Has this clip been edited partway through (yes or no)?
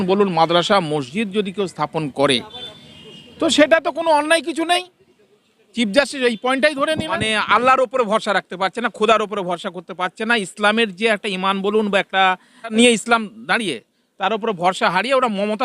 yes